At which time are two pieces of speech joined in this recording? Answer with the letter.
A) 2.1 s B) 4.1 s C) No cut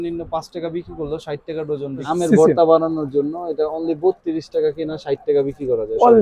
A